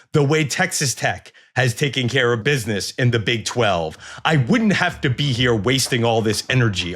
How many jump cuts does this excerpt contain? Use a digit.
1